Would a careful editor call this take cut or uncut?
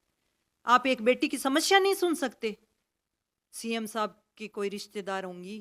cut